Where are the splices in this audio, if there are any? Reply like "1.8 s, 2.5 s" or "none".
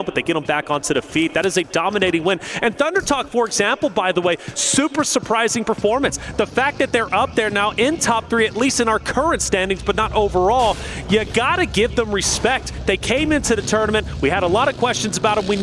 2.5 s, 6.2 s, 10.0 s, 13.9 s